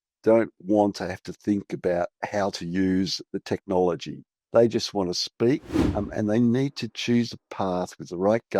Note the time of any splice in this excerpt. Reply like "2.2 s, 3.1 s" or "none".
3.2 s, 5.7 s